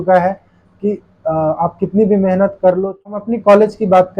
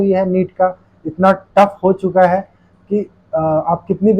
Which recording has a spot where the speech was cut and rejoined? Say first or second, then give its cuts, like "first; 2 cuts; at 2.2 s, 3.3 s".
first; 1 cut; at 3.1 s